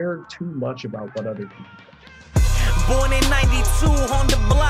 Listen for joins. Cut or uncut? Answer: cut